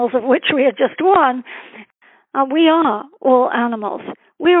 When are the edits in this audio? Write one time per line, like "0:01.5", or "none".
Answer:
0:01.7